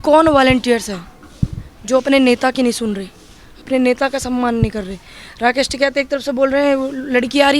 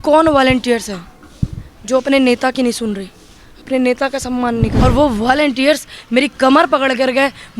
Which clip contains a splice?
second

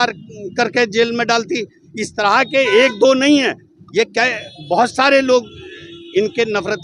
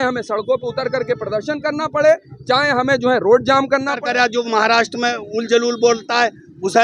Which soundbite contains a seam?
second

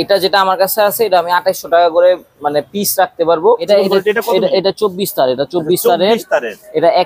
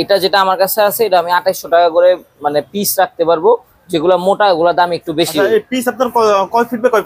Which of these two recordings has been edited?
first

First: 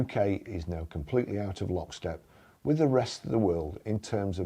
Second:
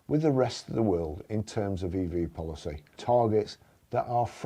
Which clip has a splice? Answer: second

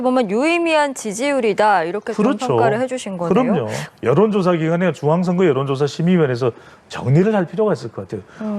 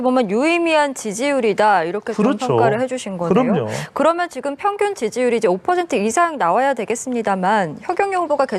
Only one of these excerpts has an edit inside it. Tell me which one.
first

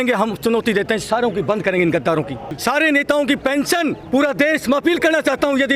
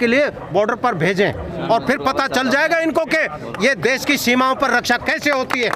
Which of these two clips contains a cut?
first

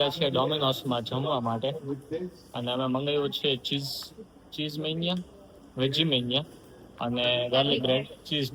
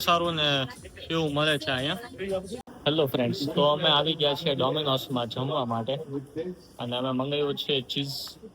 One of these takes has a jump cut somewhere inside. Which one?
second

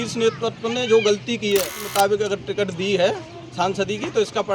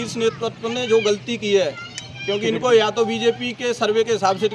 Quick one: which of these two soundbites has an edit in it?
first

